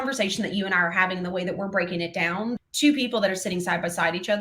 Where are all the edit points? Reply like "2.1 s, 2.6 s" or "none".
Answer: 2.6 s